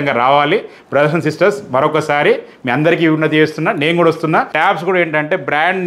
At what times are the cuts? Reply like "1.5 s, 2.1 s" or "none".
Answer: 4.5 s

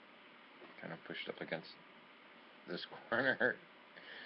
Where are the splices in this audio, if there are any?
3.1 s

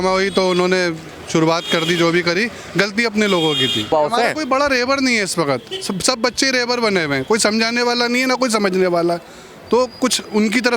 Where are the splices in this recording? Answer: 3.9 s

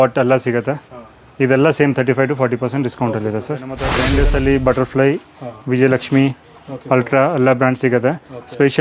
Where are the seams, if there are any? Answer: 3.9 s

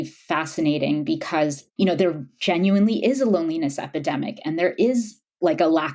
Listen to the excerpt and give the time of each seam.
1.6 s

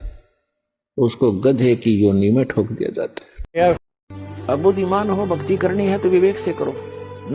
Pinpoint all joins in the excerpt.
3.9 s

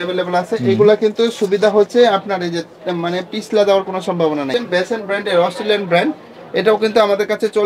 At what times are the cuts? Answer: 4.5 s

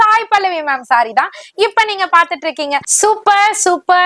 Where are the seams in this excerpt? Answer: 2.9 s

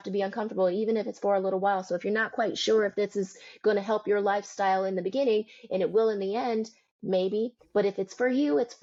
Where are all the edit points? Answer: none

